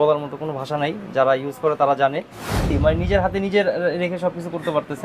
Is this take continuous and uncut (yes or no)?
no